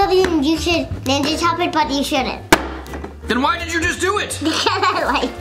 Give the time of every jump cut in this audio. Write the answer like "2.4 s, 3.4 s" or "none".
none